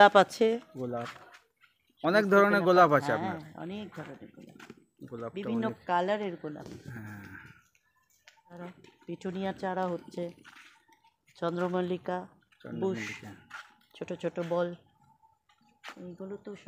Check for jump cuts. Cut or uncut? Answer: uncut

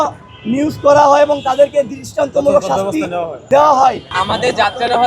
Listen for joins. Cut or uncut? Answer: cut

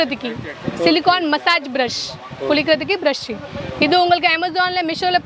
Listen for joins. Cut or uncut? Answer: uncut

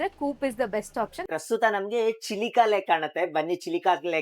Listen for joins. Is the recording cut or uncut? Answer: cut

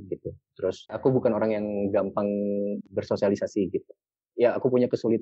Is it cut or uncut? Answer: cut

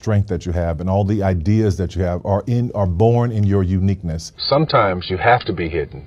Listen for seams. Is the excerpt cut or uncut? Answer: cut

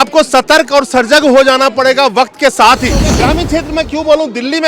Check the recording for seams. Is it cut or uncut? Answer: cut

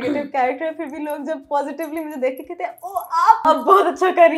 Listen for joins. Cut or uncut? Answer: cut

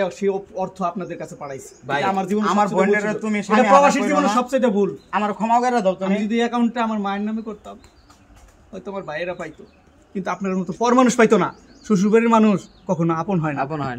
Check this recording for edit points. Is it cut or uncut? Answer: uncut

